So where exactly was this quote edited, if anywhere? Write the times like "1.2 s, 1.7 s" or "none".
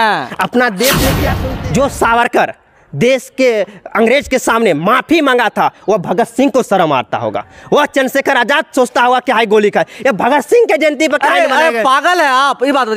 1.3 s